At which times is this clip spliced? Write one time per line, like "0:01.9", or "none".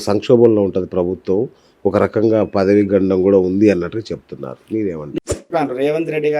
0:05.2